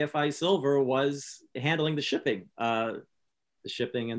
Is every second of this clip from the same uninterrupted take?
no; 1 cut; at 1.6 s

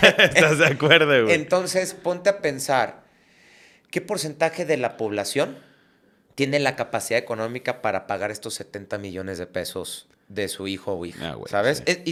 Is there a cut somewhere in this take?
no; 0 cuts

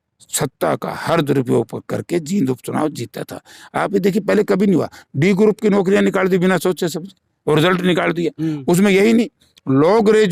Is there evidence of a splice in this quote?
no; 0 cuts

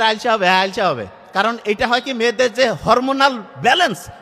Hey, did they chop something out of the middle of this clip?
no; 0 cuts

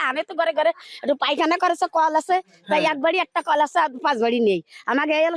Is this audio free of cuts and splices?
yes; 0 cuts

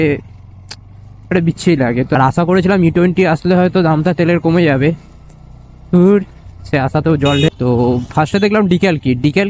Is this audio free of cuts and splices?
no; 2 cuts; at 2.2 s, 7.5 s

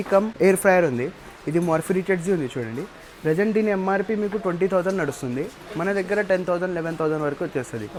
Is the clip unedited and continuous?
yes; 0 cuts

